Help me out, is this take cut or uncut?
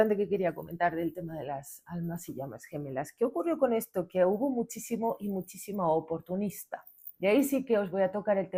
uncut